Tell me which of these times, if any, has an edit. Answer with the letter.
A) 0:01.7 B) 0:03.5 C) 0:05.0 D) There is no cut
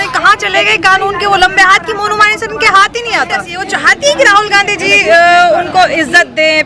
B